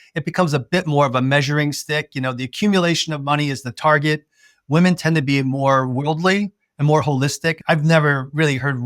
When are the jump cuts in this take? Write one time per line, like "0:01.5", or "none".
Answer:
0:07.6